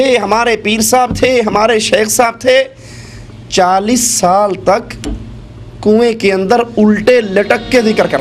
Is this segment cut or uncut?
uncut